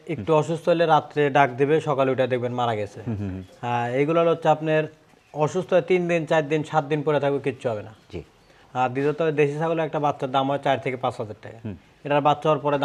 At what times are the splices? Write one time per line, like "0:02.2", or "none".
none